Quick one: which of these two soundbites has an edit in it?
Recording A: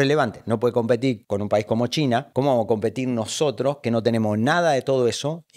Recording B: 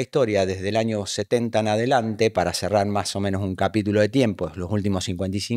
A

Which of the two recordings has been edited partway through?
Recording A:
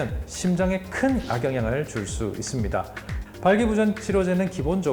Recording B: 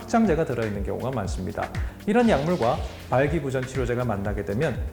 A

